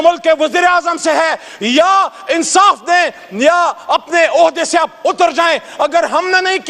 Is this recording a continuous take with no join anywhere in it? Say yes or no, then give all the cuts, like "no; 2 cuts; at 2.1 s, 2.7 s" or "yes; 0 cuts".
yes; 0 cuts